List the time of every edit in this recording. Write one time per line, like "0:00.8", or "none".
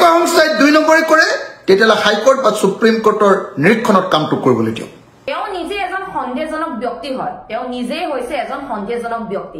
0:05.3